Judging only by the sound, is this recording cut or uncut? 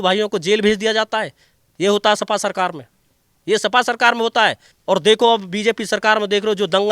cut